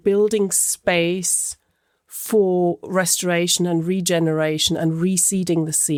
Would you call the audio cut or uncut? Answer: uncut